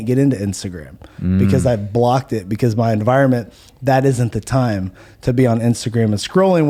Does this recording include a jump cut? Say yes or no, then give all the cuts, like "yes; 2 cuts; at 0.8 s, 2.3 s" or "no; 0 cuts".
no; 0 cuts